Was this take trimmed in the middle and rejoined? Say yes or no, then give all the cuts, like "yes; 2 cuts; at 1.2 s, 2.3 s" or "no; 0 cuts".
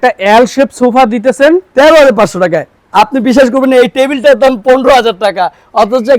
no; 0 cuts